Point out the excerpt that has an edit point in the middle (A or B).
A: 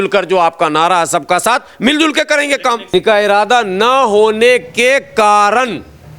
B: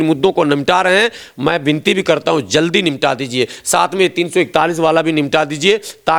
A